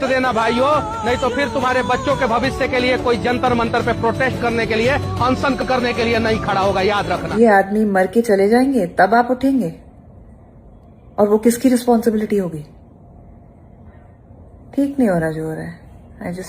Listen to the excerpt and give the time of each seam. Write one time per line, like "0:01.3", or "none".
0:07.3